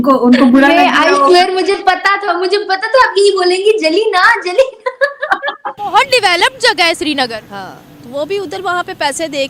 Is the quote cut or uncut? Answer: cut